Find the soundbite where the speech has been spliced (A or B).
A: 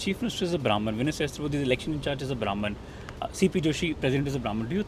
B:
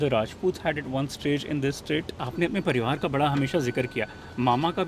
B